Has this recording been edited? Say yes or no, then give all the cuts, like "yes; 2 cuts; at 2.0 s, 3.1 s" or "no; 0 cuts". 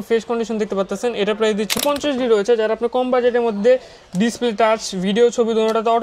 yes; 1 cut; at 1.8 s